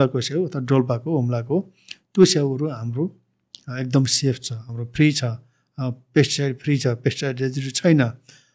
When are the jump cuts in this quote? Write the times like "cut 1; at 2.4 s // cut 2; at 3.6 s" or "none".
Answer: none